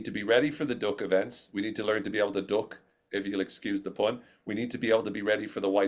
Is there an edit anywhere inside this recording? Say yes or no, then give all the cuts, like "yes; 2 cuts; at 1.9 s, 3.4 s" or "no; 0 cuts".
no; 0 cuts